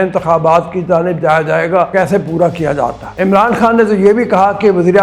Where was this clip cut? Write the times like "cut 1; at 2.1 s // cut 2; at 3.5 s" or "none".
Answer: cut 1; at 1.9 s // cut 2; at 3.0 s